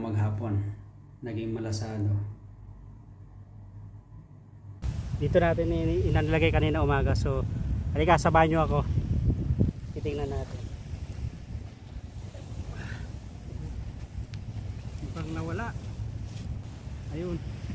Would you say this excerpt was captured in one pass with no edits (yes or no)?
no